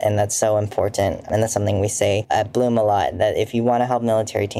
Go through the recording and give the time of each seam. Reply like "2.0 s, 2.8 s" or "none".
2.2 s